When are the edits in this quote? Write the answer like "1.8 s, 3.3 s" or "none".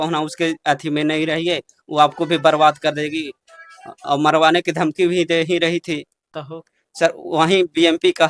6.3 s